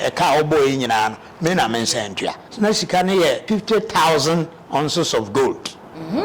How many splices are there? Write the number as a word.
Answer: two